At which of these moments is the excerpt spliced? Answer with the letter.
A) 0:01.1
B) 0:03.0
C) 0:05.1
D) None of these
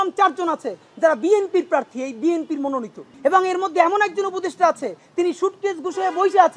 B